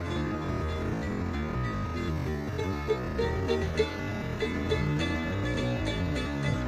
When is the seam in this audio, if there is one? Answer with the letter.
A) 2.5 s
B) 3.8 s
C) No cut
C